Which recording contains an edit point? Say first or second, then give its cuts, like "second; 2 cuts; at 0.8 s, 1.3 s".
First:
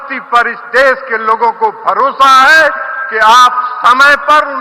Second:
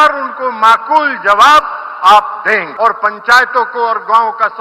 second; 1 cut; at 2.7 s